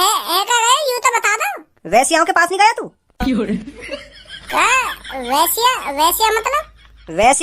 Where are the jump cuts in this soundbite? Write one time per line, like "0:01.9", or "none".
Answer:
0:01.7